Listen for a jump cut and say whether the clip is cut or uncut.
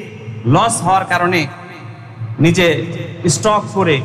uncut